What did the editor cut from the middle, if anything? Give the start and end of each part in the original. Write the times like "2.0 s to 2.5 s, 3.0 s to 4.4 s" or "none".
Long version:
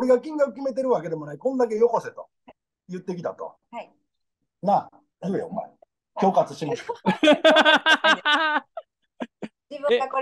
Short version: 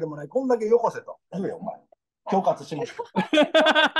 2.2 s to 5.0 s